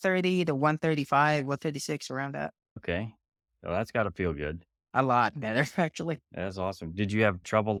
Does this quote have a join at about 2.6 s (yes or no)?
no